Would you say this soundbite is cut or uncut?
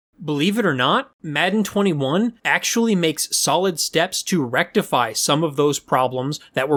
uncut